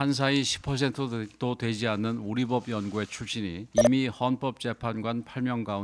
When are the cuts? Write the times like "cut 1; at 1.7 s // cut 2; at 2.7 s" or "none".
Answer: cut 1; at 3.6 s